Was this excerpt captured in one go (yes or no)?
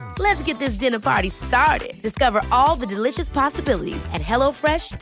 yes